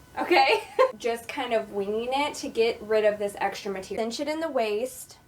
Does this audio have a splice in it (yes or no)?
yes